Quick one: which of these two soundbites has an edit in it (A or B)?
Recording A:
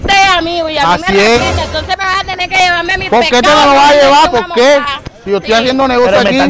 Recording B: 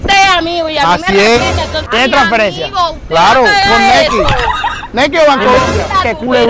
B